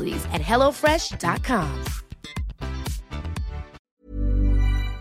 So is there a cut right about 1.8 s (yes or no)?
no